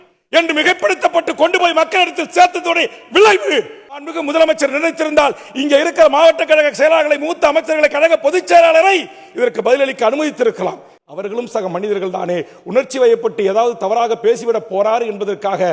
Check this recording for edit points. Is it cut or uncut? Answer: cut